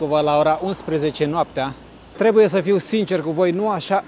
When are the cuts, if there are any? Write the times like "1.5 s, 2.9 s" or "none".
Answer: 2.0 s